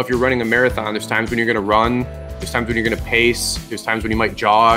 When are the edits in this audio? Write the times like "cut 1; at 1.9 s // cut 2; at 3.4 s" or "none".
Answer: none